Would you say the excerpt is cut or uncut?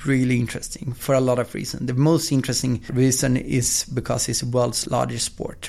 cut